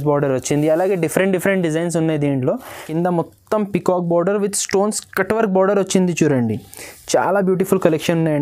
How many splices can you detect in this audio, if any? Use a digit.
1